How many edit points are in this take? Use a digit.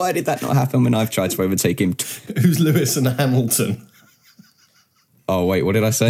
1